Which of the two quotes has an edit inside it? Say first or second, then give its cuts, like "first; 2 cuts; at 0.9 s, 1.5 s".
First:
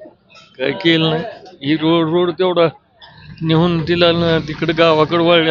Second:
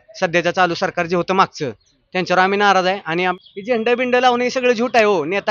second; 1 cut; at 3.4 s